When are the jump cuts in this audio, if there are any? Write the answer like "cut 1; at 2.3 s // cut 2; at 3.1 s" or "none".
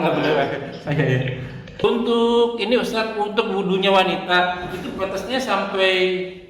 cut 1; at 1.8 s

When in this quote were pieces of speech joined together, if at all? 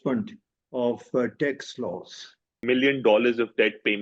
cut 1; at 2.6 s

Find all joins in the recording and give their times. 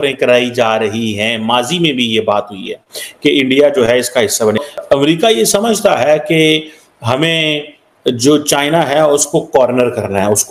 cut 1; at 4.8 s

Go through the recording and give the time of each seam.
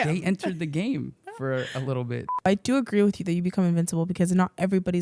cut 1; at 2.5 s

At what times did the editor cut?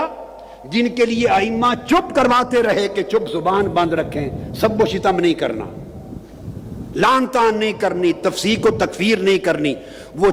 none

